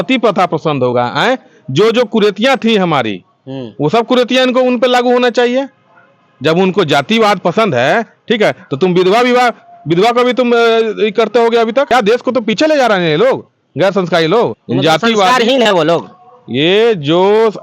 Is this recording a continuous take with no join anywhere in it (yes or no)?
no